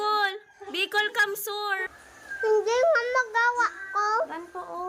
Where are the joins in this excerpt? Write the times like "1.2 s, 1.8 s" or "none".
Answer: 1.9 s